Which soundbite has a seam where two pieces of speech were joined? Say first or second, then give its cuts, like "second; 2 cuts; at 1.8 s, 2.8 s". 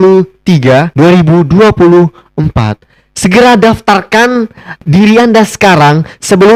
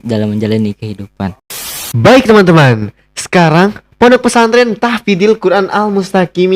second; 1 cut; at 1.4 s